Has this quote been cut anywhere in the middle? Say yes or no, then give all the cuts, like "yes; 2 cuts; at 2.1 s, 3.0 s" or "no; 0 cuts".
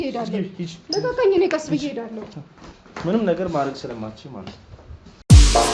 no; 0 cuts